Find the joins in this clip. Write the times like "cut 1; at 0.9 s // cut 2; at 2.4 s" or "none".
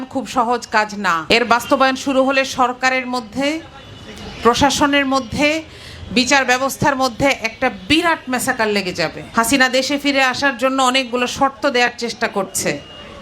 cut 1; at 1.2 s // cut 2; at 9.2 s